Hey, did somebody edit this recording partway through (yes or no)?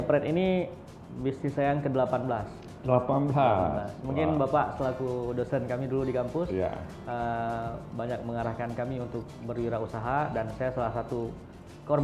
no